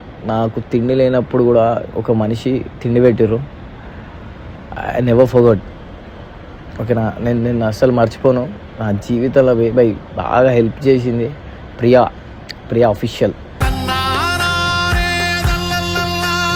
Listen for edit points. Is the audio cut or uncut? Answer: uncut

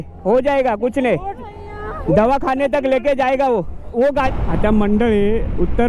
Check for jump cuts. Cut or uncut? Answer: cut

